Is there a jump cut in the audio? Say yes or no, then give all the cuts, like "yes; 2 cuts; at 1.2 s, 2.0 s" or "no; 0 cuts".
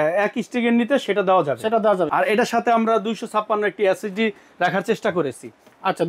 yes; 1 cut; at 2.1 s